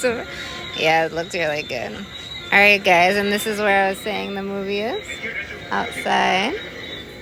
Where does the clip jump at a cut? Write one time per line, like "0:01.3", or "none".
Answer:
none